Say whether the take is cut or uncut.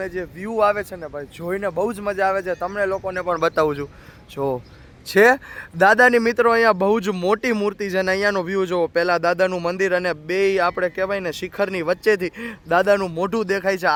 uncut